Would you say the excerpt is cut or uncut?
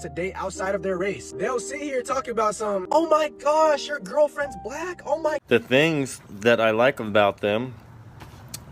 cut